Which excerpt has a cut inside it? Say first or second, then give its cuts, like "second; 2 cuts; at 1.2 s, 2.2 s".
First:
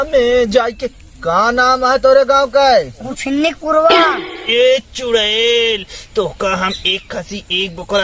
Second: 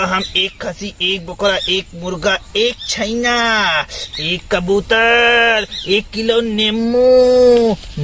first; 1 cut; at 4.1 s